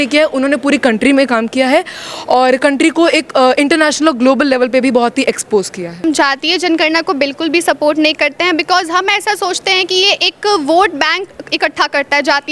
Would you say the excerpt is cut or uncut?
cut